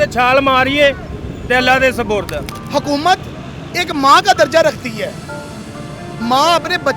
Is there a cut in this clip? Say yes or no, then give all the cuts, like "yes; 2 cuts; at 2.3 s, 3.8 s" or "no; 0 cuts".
yes; 1 cut; at 2.5 s